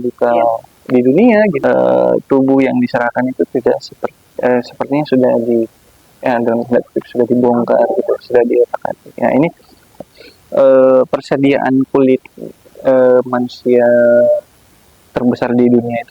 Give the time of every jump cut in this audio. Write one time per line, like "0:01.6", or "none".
0:01.6
0:10.1